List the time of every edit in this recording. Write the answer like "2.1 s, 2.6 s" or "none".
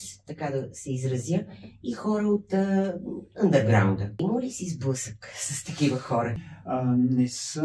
4.2 s, 6.3 s